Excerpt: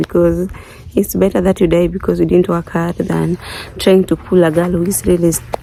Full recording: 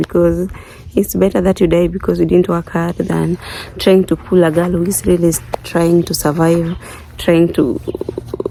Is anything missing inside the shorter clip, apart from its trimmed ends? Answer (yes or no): no